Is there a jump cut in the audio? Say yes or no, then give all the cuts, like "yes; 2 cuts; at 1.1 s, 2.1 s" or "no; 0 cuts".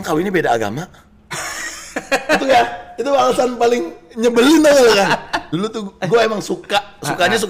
yes; 1 cut; at 5.4 s